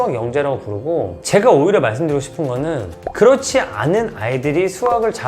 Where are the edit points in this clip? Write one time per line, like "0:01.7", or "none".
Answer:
0:01.2
0:02.9

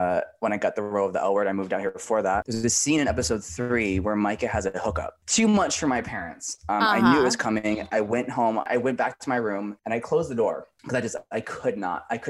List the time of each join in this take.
0:02.5
0:05.1
0:08.7

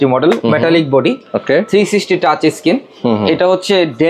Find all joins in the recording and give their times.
none

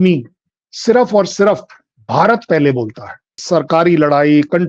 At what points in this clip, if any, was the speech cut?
0:03.4

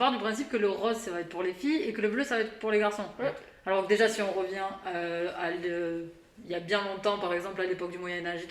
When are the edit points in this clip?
none

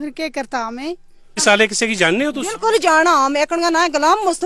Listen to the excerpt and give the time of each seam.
0:01.4

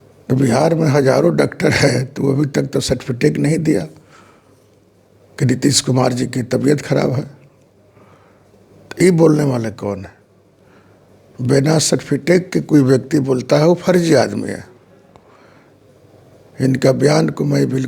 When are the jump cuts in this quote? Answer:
none

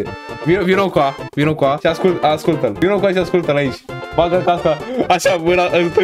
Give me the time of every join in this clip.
0:01.8
0:02.7

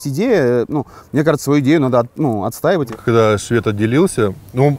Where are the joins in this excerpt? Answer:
0:02.9

